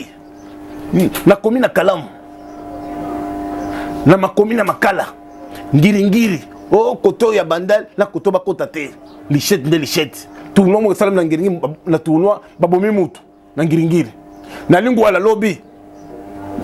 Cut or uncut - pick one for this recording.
uncut